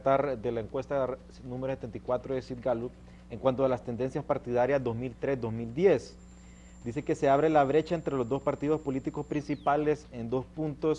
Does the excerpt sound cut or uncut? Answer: uncut